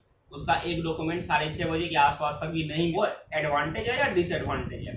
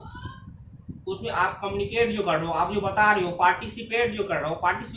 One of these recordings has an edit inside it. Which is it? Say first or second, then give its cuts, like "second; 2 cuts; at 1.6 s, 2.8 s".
first; 1 cut; at 2.9 s